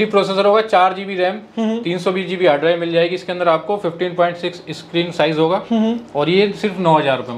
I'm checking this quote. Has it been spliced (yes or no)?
no